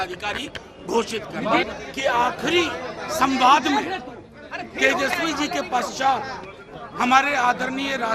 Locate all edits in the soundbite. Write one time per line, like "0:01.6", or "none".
0:01.6